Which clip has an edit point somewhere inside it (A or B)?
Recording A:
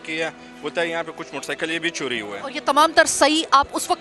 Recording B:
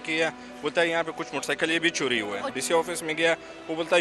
B